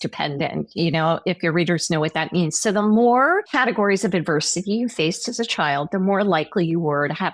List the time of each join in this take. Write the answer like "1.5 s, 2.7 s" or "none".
3.5 s